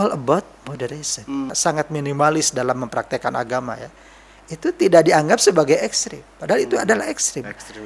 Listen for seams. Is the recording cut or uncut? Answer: cut